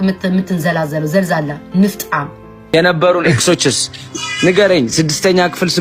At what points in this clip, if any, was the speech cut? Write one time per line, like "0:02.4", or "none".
0:02.7